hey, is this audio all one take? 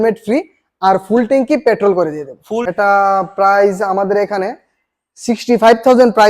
no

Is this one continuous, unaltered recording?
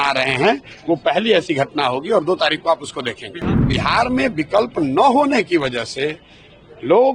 no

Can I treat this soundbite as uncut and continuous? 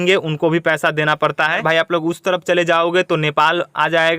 no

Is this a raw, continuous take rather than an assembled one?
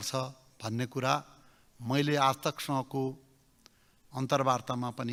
yes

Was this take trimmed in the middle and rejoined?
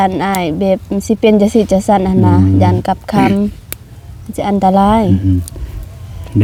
no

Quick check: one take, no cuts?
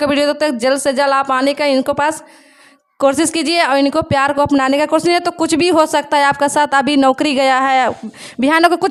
yes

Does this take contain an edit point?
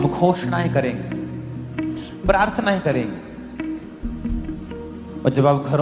no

